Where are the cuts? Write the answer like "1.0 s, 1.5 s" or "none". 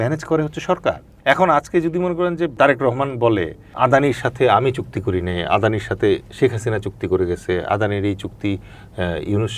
1.1 s, 2.5 s, 3.7 s